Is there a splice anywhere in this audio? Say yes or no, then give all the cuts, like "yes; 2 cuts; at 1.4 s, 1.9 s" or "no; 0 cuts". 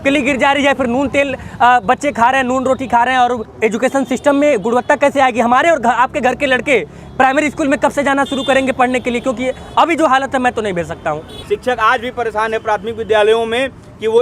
yes; 2 cuts; at 3.5 s, 11.4 s